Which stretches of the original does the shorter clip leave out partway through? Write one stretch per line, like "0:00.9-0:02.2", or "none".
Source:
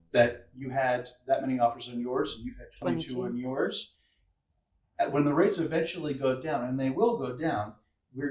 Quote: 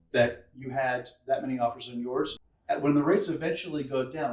0:02.5-0:04.8